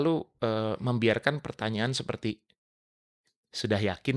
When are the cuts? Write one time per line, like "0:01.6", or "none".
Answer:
none